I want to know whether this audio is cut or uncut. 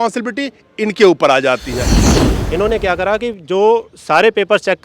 cut